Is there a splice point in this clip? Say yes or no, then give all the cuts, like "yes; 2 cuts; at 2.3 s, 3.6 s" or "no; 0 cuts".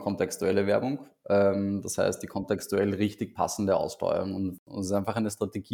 yes; 1 cut; at 4.6 s